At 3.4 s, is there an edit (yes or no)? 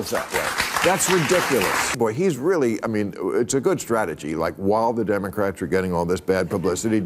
no